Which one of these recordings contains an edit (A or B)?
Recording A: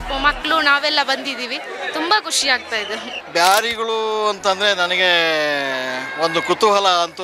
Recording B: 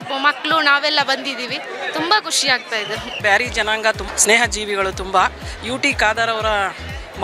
B